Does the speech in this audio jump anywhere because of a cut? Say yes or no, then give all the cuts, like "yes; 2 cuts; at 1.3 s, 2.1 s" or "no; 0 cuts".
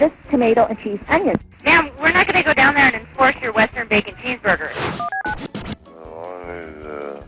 yes; 3 cuts; at 1.5 s, 4.7 s, 5.9 s